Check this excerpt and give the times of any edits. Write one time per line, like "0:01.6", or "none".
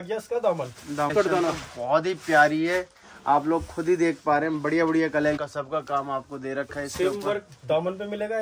0:01.1
0:05.4